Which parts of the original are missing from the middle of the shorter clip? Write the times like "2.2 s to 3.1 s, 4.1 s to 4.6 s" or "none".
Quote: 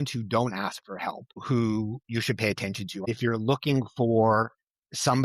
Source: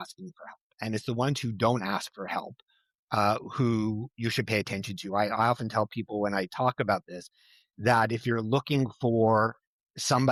2.7 s to 3.5 s, 5.1 s to 8.1 s